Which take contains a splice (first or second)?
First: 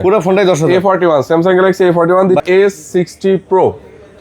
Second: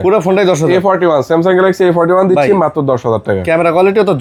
first